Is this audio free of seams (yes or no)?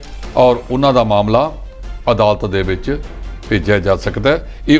yes